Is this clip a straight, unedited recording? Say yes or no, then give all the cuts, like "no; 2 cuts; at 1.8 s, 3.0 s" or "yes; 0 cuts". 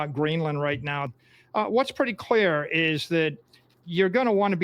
no; 1 cut; at 1.1 s